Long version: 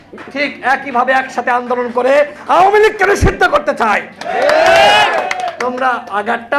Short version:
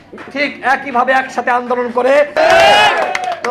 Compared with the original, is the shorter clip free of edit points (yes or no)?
no